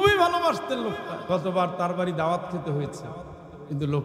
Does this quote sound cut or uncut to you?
cut